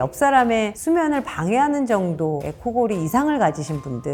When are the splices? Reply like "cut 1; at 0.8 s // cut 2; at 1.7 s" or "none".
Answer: none

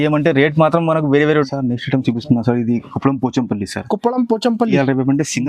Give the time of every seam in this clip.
cut 1; at 1.5 s

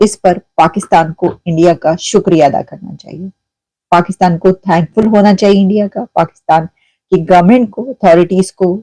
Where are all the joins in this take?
none

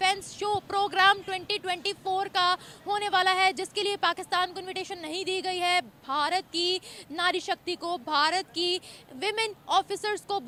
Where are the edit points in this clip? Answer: none

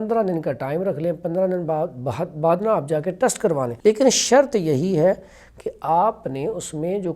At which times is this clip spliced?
cut 1; at 3.7 s

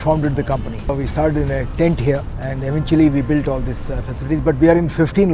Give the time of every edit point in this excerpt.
cut 1; at 0.9 s // cut 2; at 2.4 s

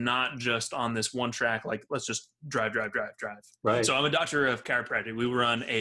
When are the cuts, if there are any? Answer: cut 1; at 3.9 s

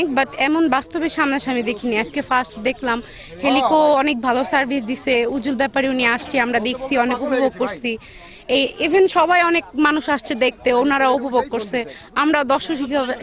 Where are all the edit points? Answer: none

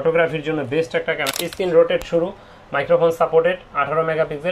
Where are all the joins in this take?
cut 1; at 1.3 s

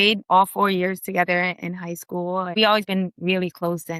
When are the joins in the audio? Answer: cut 1; at 2.6 s

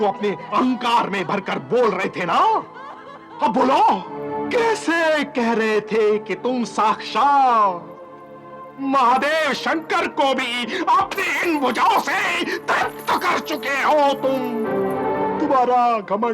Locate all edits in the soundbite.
cut 1; at 4.2 s // cut 2; at 15.4 s

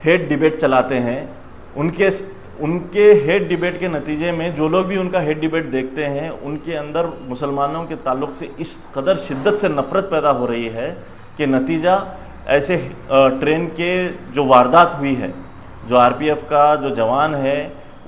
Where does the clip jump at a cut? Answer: none

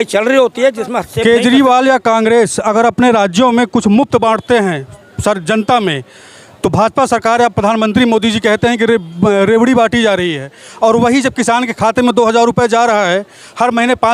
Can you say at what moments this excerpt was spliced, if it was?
cut 1; at 1.1 s

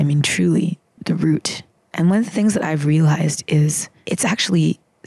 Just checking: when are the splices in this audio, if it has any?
cut 1; at 3.9 s

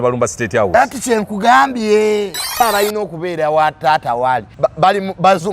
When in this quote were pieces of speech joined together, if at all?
cut 1; at 2.6 s // cut 2; at 4.5 s

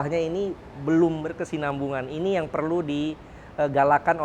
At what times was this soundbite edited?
cut 1; at 1.4 s

